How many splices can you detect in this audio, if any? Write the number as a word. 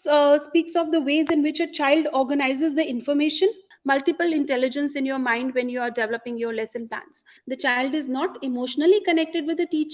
two